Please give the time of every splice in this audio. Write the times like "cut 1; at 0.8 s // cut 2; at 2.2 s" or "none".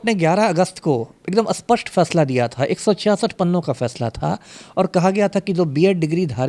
none